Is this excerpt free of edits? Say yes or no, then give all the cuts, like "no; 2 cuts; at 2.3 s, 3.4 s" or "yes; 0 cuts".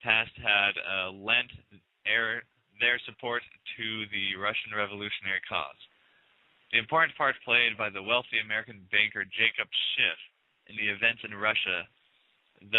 no; 1 cut; at 3.1 s